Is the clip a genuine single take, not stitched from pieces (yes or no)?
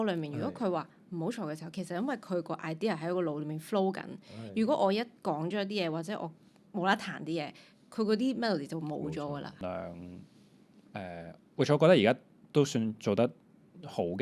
no